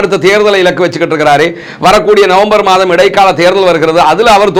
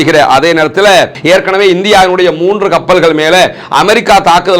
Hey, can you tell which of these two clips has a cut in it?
second; 1 cut; at 1.2 s

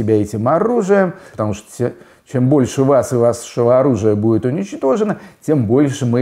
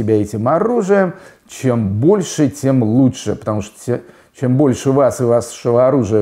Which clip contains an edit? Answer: first; 1 cut; at 1.3 s

